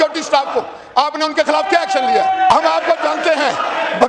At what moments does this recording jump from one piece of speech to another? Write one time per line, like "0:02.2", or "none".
0:02.5

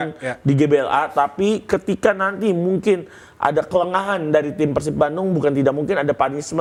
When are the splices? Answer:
none

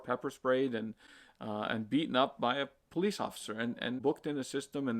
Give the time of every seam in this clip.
0:04.0

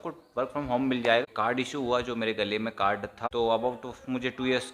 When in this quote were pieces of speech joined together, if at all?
0:01.2
0:03.2

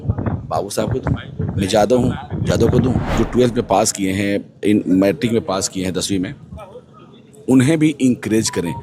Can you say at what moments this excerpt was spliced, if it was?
0:03.1

